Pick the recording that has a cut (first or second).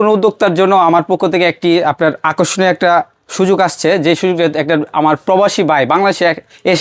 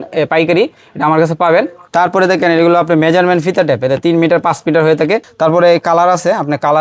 second